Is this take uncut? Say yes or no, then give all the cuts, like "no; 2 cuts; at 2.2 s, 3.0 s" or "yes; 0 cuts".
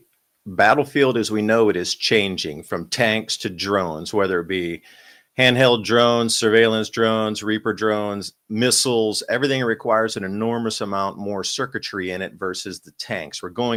yes; 0 cuts